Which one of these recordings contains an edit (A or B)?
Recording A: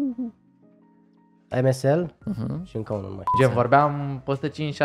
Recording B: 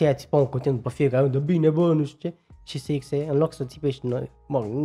A